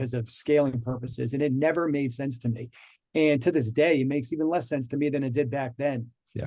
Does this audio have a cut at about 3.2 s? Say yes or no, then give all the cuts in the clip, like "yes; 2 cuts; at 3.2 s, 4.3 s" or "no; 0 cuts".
no; 0 cuts